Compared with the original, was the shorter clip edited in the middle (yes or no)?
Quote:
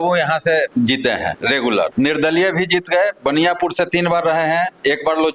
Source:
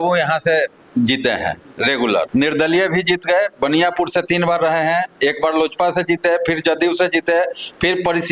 yes